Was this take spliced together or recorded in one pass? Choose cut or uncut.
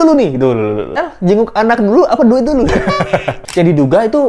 cut